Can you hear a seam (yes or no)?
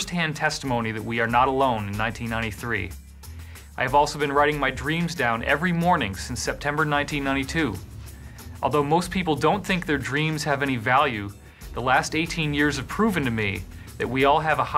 yes